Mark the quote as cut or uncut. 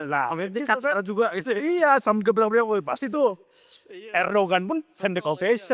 uncut